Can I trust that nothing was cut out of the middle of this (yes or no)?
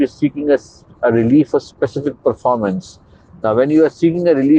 yes